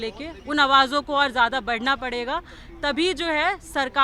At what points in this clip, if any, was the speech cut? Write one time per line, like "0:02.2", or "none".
none